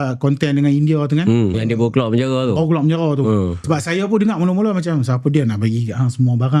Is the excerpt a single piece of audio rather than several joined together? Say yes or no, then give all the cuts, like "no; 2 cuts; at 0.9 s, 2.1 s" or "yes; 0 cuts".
no; 2 cuts; at 1.6 s, 3.6 s